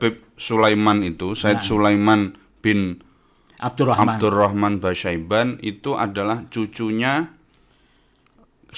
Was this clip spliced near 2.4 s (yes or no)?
no